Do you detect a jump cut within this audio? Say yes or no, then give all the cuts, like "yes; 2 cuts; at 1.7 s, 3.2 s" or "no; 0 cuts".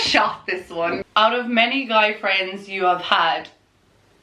yes; 1 cut; at 1.0 s